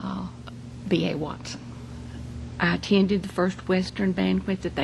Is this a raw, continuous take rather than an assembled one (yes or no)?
no